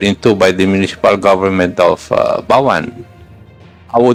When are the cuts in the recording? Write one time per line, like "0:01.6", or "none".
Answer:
none